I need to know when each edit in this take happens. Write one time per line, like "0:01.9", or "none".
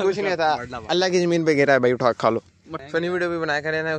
0:02.7